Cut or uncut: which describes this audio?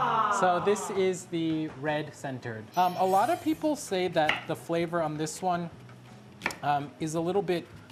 uncut